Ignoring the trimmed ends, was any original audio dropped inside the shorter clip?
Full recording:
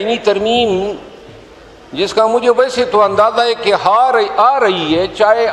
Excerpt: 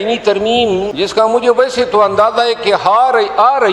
yes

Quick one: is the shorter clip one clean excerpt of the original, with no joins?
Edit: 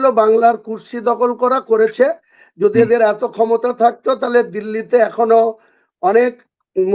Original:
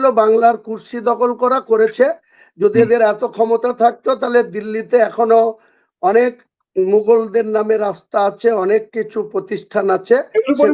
yes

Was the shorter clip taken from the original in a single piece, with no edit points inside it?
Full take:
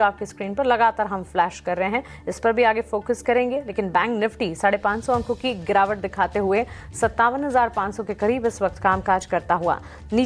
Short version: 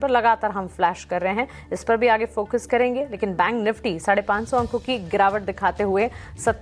yes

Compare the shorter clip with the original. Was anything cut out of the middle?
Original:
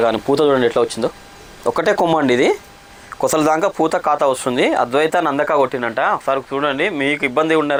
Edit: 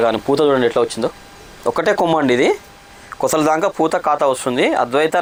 no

